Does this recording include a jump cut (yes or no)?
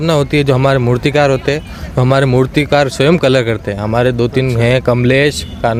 no